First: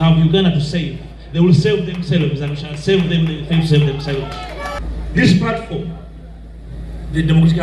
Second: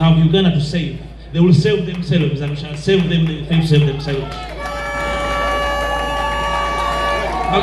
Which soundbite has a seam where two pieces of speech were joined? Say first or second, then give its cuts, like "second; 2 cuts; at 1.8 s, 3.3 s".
first; 1 cut; at 4.8 s